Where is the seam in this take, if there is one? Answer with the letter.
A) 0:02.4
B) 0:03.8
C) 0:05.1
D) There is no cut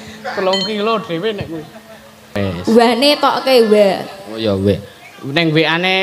A